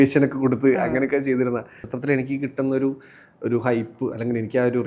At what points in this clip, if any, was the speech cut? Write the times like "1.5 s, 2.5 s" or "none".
1.9 s